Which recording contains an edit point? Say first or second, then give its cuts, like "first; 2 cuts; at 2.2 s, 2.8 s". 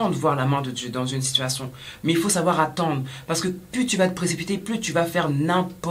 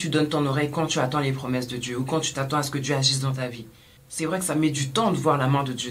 second; 1 cut; at 4.0 s